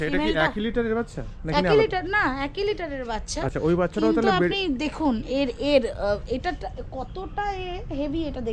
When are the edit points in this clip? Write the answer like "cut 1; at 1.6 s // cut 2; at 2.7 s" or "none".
none